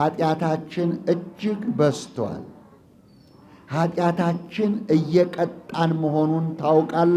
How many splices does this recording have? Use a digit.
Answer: 0